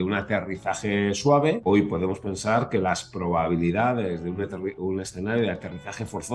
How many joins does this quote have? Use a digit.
1